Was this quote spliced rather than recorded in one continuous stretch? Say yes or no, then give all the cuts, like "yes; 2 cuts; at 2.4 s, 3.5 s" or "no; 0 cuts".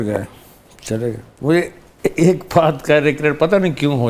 no; 0 cuts